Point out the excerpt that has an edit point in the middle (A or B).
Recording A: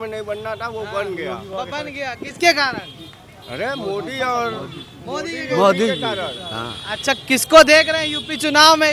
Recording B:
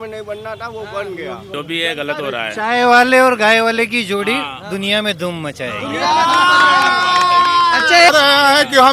B